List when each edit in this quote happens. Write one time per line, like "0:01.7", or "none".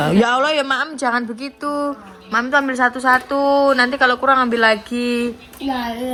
none